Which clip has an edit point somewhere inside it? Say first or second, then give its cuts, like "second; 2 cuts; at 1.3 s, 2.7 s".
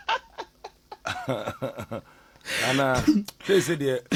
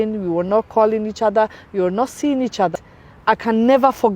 second; 1 cut; at 2.7 s